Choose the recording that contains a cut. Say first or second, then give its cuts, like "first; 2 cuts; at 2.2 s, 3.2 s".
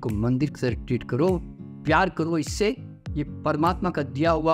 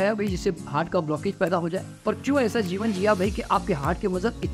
second; 1 cut; at 1.9 s